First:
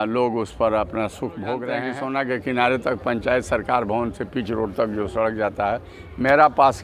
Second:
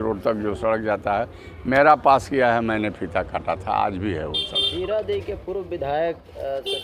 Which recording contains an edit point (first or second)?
first